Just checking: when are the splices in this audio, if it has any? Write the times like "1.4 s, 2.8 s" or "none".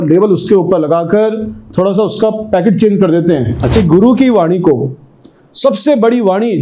3.8 s